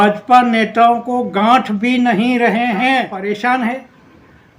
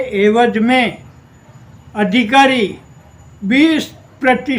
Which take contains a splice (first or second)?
first